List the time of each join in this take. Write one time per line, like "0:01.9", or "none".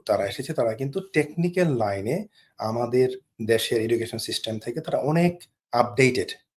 none